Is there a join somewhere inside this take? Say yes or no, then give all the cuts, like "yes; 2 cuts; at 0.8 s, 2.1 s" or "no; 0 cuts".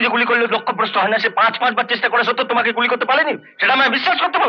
no; 0 cuts